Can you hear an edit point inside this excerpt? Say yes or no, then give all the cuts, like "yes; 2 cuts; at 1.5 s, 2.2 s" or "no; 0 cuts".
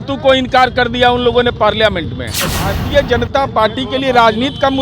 yes; 1 cut; at 2.7 s